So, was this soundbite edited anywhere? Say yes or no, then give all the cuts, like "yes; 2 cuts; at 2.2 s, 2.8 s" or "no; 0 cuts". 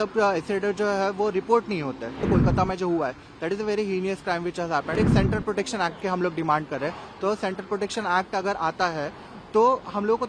yes; 2 cuts; at 2.2 s, 5.0 s